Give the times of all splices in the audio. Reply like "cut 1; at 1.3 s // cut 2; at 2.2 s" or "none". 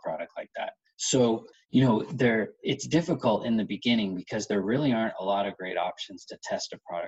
cut 1; at 1.5 s